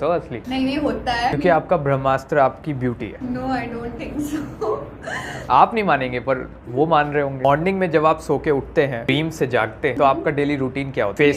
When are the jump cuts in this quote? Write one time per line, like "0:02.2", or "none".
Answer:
0:01.4
0:07.4